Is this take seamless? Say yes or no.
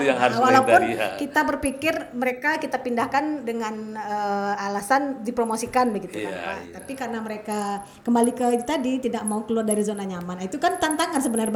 yes